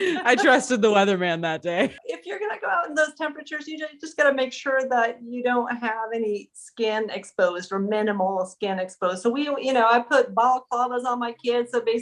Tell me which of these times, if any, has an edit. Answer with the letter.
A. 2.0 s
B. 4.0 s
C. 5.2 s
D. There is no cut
A